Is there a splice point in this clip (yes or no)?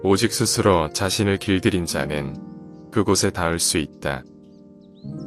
yes